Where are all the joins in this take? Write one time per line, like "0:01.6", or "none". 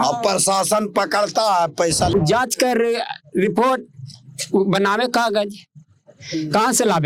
0:02.1